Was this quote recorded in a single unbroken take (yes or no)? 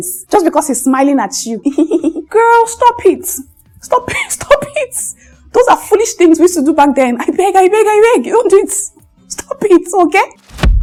yes